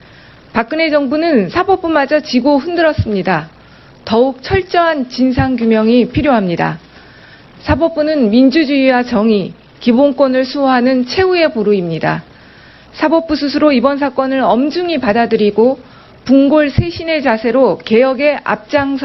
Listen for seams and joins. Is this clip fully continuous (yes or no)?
no